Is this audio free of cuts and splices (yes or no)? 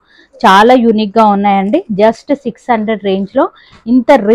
yes